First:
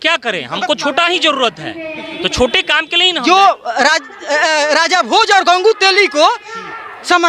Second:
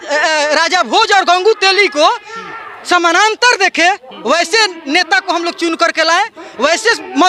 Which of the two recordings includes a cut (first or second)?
first